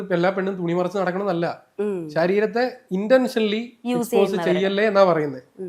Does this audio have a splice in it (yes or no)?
no